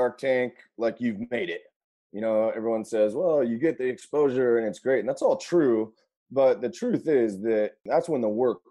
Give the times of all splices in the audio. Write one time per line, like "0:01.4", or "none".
0:07.8